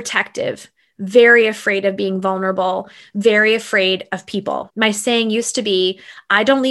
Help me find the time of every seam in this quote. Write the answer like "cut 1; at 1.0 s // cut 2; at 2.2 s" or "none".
cut 1; at 4.7 s

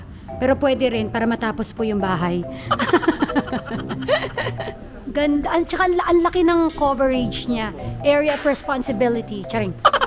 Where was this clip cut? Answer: cut 1; at 4.7 s

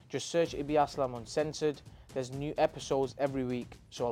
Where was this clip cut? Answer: none

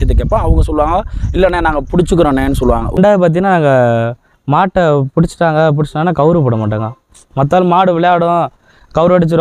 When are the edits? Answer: cut 1; at 3.0 s

